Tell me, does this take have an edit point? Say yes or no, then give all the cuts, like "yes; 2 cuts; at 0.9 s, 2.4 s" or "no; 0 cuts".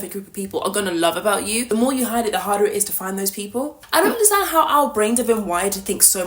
yes; 2 cuts; at 1.6 s, 3.8 s